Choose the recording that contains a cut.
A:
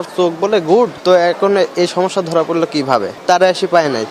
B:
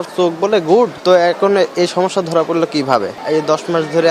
B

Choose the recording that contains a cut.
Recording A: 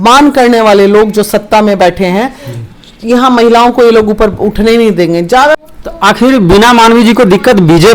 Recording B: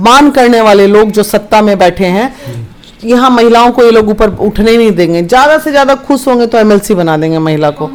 A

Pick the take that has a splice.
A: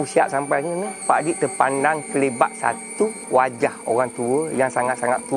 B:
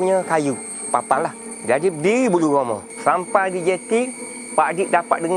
A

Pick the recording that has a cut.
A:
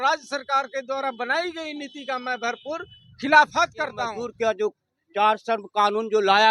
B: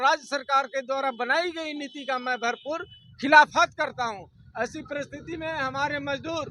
A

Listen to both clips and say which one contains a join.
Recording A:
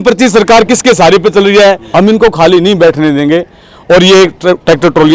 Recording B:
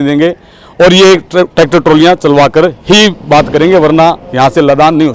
A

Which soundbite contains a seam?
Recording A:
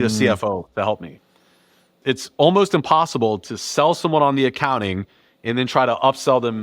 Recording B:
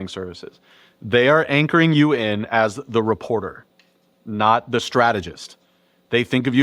A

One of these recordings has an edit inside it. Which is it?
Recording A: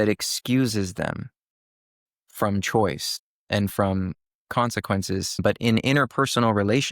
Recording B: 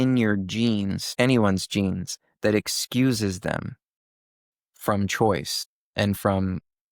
A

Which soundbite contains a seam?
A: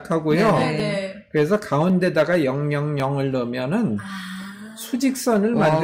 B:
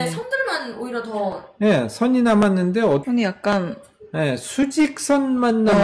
B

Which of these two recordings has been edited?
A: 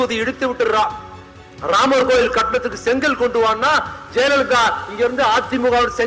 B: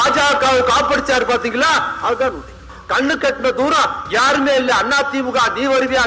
B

